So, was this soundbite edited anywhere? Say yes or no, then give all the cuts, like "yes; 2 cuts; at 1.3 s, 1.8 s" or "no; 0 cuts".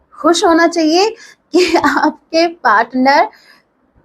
no; 0 cuts